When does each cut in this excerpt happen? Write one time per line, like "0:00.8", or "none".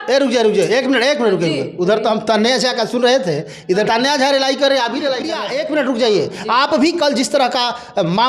0:03.9
0:05.4